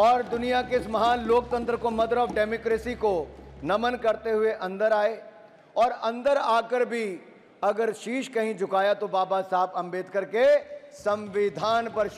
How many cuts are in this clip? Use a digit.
0